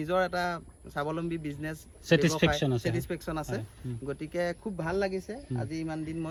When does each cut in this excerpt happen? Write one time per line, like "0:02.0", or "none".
none